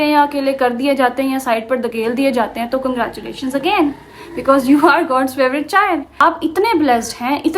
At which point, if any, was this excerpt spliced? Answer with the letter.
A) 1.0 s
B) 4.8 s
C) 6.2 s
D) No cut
C